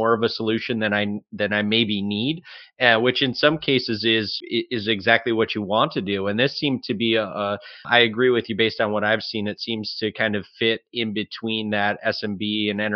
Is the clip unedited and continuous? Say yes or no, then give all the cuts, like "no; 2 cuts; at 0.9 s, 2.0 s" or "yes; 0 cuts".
no; 2 cuts; at 4.4 s, 7.8 s